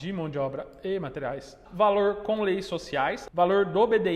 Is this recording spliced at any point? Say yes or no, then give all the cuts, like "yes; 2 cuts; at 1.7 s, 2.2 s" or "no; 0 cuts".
yes; 2 cuts; at 1.6 s, 3.2 s